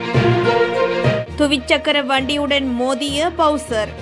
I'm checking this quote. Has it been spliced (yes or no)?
no